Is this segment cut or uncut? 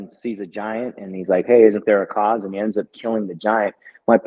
uncut